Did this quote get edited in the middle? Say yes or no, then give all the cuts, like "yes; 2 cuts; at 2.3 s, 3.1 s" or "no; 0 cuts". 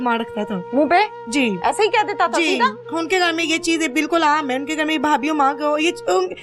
no; 0 cuts